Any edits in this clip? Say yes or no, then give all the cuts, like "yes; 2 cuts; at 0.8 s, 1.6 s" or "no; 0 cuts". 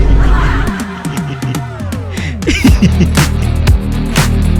no; 0 cuts